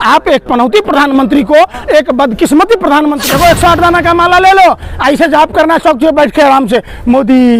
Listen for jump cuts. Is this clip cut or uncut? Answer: cut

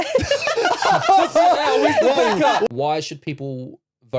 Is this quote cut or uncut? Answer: cut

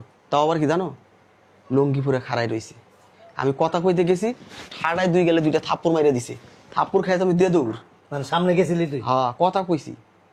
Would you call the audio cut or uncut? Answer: uncut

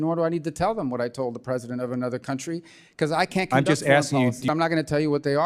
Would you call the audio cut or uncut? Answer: cut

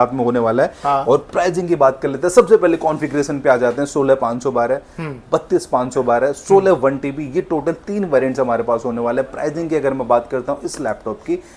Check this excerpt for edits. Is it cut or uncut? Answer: uncut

